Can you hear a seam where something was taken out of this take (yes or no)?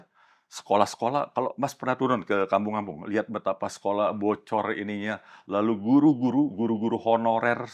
no